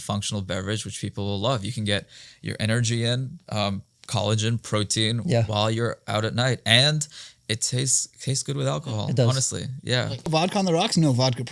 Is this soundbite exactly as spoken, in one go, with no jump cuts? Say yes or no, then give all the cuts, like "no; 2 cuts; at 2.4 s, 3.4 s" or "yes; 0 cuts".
no; 1 cut; at 10.3 s